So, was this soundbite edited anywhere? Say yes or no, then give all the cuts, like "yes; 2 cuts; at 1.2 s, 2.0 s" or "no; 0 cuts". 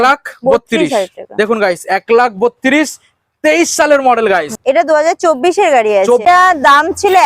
yes; 2 cuts; at 4.6 s, 6.2 s